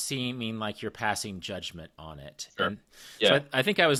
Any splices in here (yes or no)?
no